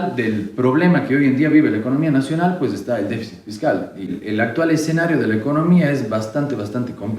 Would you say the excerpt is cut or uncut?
cut